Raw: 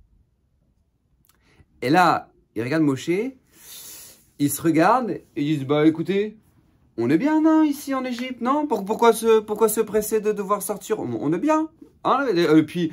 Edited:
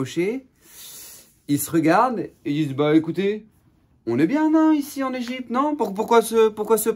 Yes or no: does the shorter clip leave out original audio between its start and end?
no